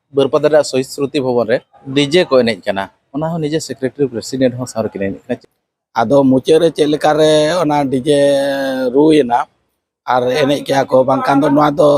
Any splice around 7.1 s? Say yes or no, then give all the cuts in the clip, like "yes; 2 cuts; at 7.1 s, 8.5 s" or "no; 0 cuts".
no; 2 cuts; at 1.8 s, 5.4 s